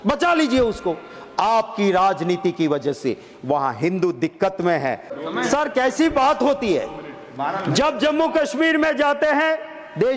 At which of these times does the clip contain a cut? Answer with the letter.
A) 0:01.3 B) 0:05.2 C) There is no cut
B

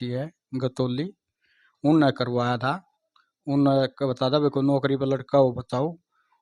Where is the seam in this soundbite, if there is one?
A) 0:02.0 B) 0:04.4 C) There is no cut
C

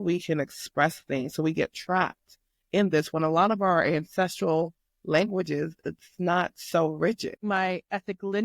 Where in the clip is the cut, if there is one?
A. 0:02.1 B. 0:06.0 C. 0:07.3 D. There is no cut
C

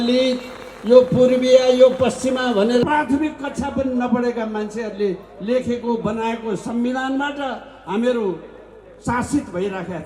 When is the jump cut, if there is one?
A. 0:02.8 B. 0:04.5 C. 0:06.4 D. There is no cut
A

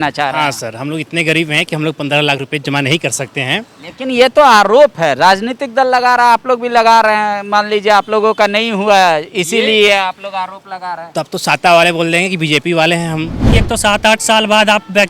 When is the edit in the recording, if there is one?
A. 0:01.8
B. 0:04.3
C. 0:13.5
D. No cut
C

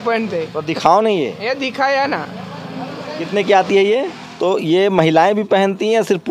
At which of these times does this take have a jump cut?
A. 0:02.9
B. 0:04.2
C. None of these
B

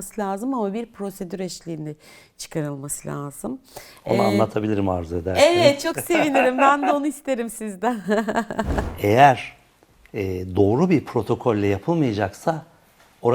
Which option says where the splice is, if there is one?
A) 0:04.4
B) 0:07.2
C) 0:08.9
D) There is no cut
C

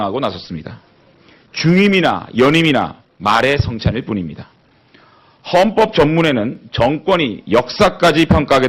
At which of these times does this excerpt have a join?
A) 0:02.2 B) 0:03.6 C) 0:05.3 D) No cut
B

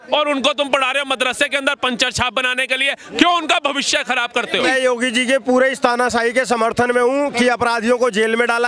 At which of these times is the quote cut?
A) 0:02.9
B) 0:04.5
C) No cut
B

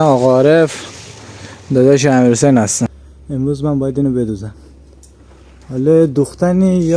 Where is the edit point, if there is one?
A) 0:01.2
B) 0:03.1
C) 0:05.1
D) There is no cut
B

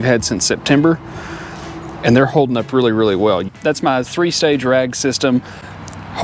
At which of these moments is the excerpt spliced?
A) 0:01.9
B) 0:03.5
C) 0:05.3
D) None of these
B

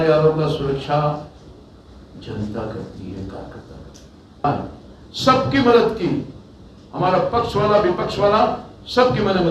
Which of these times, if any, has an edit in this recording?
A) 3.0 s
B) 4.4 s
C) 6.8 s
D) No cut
B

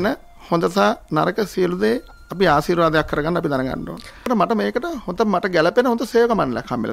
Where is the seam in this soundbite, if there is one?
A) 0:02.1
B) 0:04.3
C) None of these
B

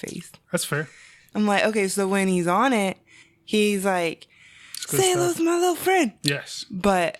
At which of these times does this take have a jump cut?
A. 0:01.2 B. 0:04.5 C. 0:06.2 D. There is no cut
A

